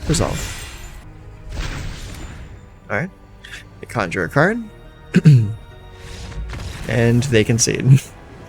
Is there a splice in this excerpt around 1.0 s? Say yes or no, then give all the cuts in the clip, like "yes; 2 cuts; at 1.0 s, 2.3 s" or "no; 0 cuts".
yes; 1 cut; at 1.0 s